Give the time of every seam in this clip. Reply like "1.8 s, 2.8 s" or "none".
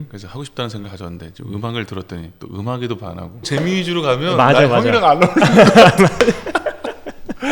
3.5 s